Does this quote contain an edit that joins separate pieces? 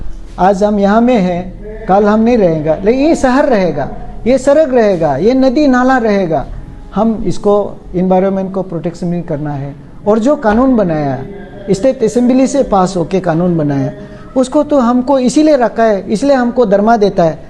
no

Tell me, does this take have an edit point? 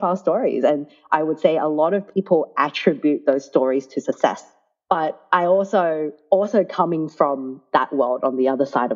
no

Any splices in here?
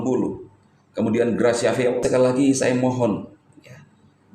yes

